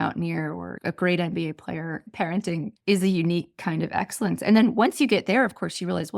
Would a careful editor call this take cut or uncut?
cut